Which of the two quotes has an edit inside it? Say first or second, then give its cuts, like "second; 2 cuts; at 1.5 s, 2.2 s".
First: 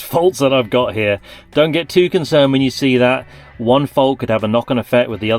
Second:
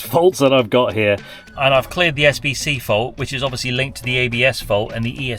second; 1 cut; at 1.3 s